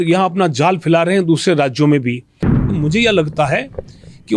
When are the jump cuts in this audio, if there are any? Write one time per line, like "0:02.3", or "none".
0:02.6